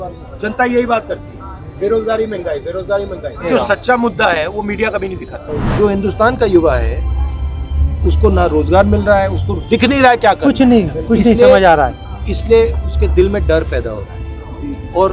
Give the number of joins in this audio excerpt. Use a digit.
1